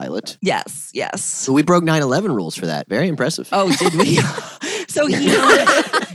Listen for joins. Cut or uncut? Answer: cut